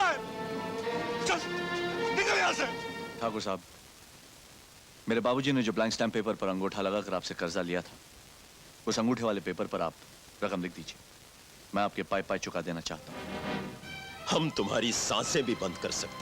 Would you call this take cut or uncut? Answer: cut